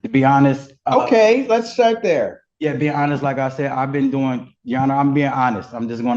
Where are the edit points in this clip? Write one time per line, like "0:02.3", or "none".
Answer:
none